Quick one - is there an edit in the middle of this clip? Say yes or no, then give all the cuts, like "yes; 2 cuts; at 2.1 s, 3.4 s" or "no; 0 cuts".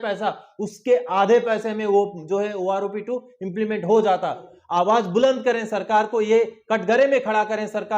yes; 1 cut; at 4.5 s